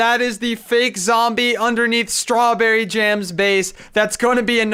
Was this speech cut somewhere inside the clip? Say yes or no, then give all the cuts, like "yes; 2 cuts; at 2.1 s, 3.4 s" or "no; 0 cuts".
no; 0 cuts